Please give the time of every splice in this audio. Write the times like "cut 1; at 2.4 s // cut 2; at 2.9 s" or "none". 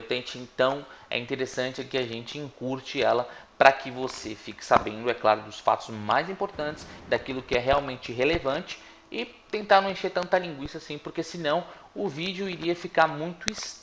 cut 1; at 3.4 s